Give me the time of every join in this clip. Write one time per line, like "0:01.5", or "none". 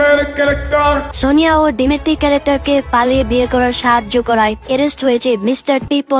0:01.1